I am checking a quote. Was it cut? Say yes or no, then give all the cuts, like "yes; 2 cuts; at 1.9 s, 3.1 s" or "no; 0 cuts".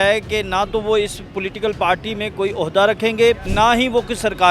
yes; 1 cut; at 3.5 s